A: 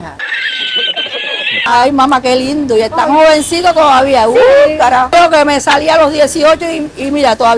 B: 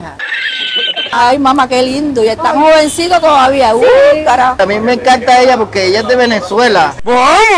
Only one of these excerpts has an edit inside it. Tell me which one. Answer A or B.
B